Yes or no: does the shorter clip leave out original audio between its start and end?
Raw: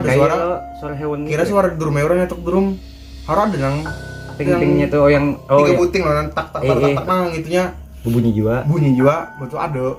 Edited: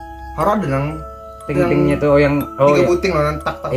no